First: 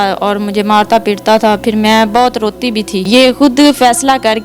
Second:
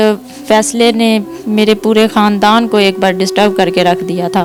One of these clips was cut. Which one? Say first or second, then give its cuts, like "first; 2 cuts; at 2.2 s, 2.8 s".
first; 1 cut; at 3.0 s